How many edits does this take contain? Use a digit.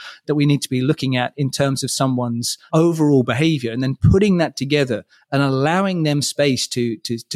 1